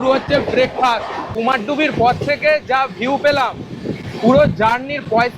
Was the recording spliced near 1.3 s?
yes; 1 cut; at 1.3 s

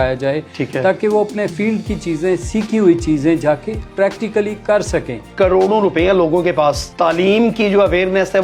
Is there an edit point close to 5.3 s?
yes; 1 cut; at 5.3 s

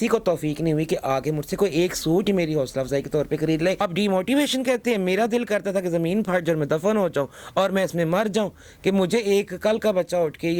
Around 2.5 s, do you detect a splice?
no; 1 cut; at 3.8 s

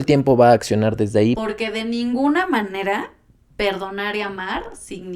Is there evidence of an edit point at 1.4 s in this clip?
yes; 1 cut; at 1.4 s

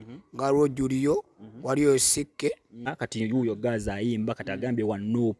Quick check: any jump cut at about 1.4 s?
no; 1 cut; at 3.0 s

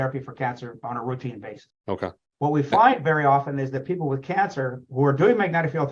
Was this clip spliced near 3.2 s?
no; 1 cut; at 2.0 s

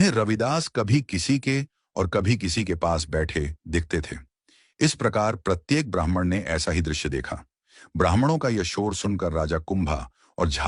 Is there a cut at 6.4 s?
yes; 1 cut; at 6.4 s

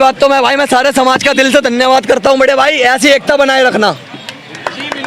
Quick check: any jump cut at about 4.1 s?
no; 0 cuts

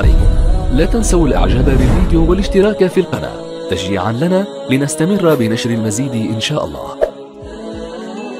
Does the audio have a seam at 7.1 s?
yes; 1 cut; at 7.1 s

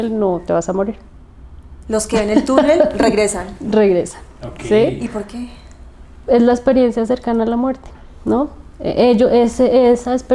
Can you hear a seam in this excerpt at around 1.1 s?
no; 0 cuts

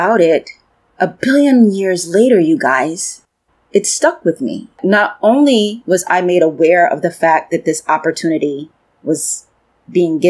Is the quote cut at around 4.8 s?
yes; 1 cut; at 4.8 s

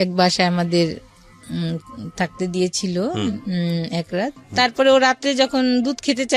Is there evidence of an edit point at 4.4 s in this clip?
yes; 1 cut; at 4.4 s

